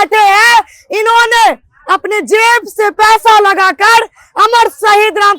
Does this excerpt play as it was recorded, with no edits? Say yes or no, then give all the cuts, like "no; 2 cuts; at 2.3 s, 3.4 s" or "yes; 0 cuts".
yes; 0 cuts